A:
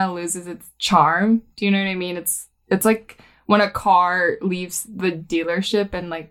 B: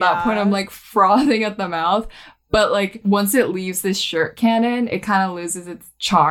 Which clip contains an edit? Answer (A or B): B